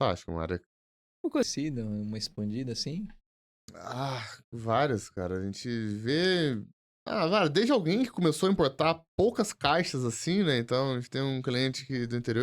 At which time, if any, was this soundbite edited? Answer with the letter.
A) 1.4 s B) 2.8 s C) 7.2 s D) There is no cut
A